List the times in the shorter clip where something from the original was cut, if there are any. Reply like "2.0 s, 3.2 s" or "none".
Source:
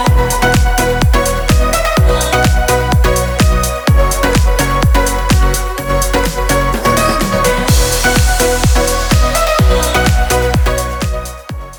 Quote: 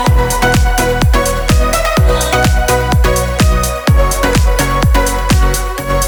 none